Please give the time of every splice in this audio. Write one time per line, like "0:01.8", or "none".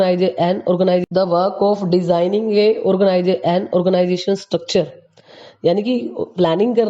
0:01.0
0:04.1

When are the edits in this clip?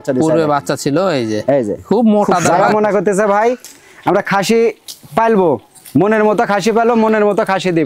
0:02.5

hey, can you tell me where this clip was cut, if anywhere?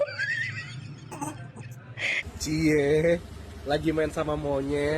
0:02.2

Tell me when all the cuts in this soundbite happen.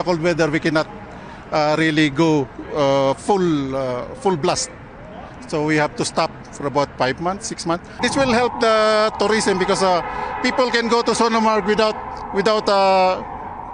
0:07.9

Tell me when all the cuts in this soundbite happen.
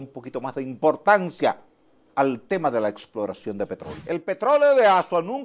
0:03.9

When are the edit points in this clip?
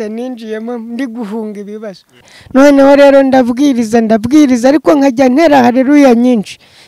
0:02.3

